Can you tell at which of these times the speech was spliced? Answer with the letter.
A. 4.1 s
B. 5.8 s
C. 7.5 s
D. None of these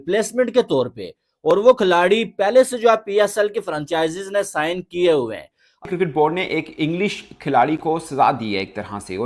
B